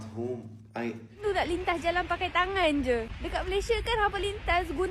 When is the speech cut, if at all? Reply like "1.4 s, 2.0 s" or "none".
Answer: 1.2 s

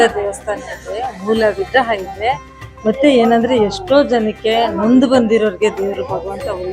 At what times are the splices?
none

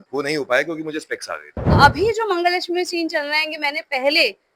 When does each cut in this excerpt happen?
1.8 s

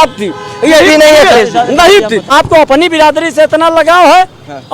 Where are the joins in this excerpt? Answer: 2.3 s

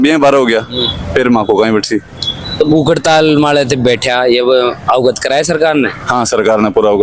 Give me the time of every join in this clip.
none

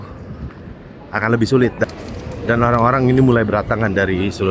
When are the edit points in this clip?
1.8 s

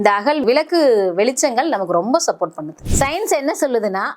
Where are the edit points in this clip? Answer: 2.7 s

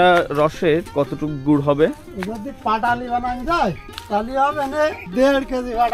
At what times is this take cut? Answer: 0.9 s, 3.9 s, 5.0 s

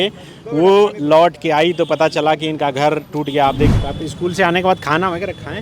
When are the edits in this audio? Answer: 3.7 s

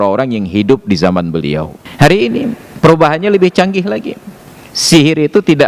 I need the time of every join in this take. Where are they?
1.8 s, 2.7 s

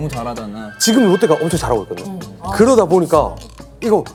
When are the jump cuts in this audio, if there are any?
none

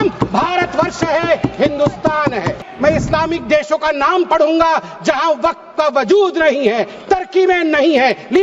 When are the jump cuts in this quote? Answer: 2.6 s

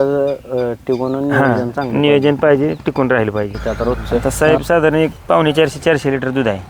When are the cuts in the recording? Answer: 4.0 s

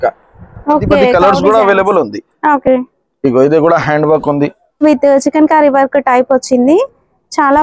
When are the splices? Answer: 1.1 s, 4.8 s

